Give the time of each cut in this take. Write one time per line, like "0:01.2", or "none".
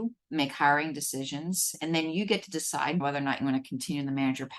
0:01.7
0:03.0